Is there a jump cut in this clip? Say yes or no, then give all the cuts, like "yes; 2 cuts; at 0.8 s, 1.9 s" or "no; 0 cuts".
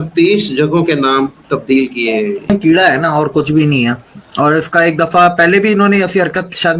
yes; 1 cut; at 2.5 s